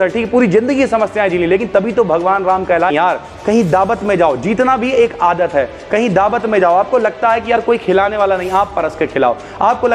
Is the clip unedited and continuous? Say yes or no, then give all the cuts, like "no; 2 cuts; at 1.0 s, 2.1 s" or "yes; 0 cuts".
no; 1 cut; at 2.9 s